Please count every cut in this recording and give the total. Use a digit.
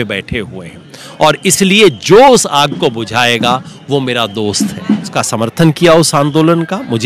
1